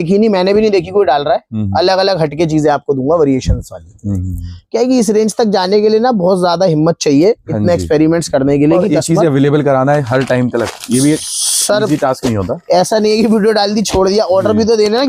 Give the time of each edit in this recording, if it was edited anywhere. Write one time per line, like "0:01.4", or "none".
none